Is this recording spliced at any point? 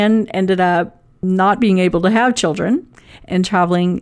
yes; 1 cut; at 1.2 s

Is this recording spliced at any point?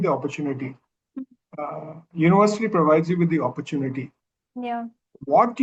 no; 0 cuts

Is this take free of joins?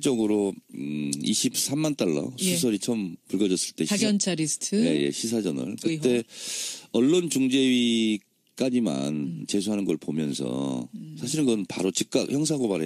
no; 1 cut; at 11.3 s

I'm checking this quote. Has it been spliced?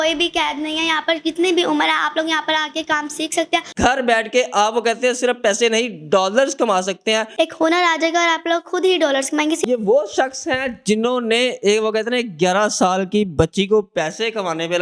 yes; 3 cuts; at 3.7 s, 7.3 s, 9.6 s

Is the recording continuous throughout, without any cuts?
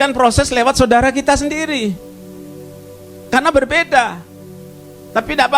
yes; 0 cuts

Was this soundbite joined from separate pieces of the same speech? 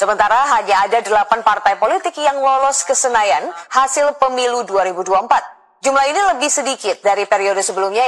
no; 0 cuts

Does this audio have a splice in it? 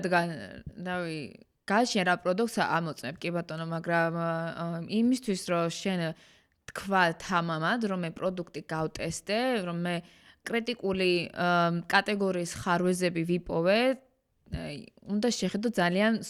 no; 0 cuts

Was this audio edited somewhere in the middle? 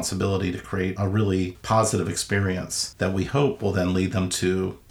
yes; 1 cut; at 1.0 s

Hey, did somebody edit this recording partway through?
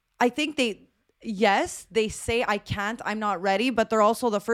no; 0 cuts

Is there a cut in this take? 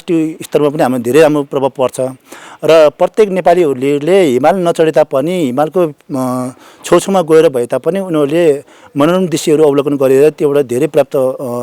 no; 0 cuts

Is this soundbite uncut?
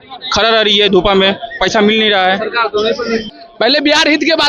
no; 1 cut; at 3.3 s

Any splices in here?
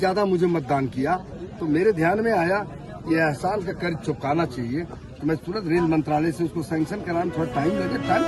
no; 0 cuts

